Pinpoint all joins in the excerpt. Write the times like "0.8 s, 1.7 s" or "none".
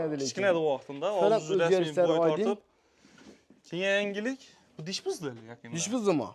none